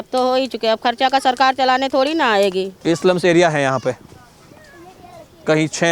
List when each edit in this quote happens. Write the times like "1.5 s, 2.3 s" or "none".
2.7 s